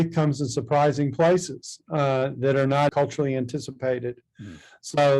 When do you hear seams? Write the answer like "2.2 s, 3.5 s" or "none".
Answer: 2.9 s